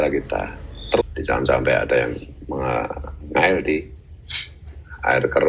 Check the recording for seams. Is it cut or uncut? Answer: cut